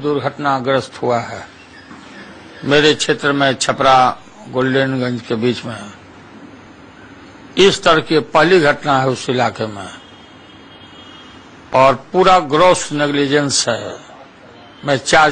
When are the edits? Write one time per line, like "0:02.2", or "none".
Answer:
none